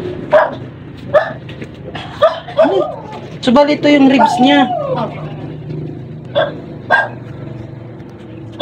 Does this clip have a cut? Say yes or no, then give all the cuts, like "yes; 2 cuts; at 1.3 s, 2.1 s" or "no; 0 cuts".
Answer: no; 0 cuts